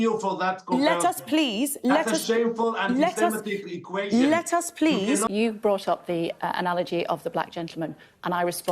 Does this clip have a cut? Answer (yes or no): yes